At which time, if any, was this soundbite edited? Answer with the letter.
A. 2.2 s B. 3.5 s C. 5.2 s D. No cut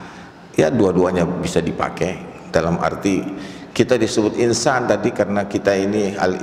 D